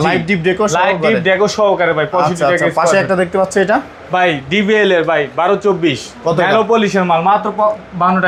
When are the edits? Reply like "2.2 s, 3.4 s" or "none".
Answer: none

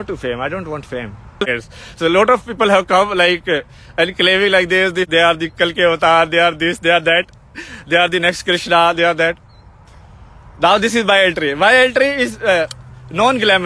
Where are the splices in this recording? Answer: 1.4 s, 5.1 s

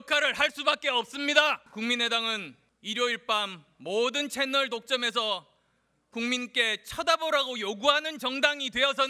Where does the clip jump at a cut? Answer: 3.1 s

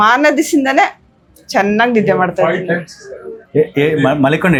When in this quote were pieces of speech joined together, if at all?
none

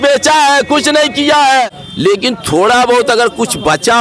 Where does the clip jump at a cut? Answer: 1.7 s

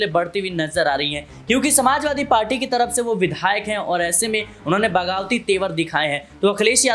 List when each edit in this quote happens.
none

